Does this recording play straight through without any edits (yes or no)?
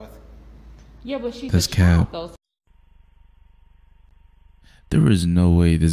no